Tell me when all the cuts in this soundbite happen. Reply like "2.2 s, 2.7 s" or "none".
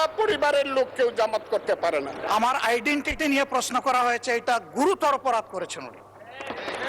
2.2 s